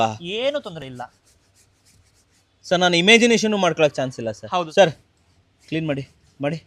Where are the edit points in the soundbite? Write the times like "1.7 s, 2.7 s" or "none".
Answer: none